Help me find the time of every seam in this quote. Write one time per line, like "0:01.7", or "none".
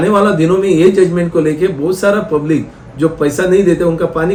none